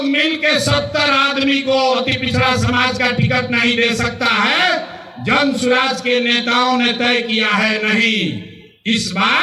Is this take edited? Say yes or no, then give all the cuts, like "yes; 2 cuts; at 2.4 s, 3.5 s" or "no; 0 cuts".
no; 0 cuts